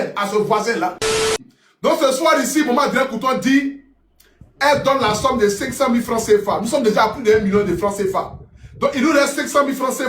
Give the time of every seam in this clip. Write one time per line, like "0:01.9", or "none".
0:01.4